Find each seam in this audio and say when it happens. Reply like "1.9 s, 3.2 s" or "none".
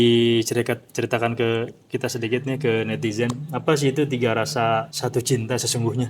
4.9 s